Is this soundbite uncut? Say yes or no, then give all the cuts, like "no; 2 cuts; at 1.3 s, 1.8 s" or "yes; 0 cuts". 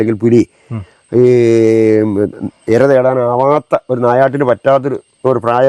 yes; 0 cuts